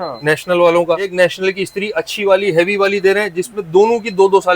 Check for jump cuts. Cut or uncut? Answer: cut